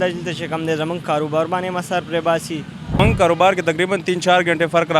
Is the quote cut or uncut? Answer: cut